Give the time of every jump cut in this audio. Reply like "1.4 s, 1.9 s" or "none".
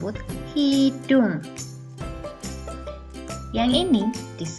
1.4 s, 2.9 s